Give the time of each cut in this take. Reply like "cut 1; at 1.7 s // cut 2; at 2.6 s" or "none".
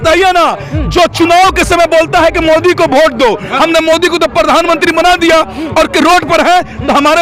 none